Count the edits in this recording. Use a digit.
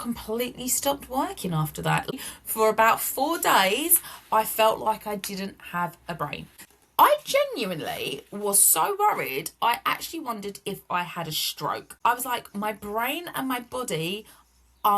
3